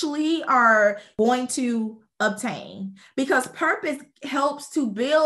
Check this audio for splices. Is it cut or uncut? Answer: cut